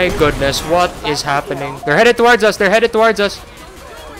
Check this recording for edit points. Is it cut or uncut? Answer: cut